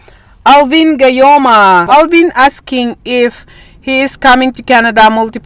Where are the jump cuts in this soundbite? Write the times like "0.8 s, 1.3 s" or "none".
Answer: 1.9 s